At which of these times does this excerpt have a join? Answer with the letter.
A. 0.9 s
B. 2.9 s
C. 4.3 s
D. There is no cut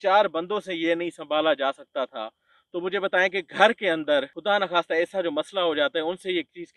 C